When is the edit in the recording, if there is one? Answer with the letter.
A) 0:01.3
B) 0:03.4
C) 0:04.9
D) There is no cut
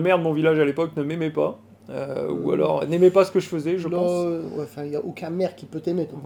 D